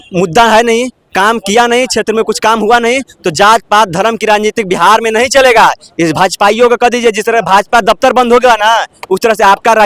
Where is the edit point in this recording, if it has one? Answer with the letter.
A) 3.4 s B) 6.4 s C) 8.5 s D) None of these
D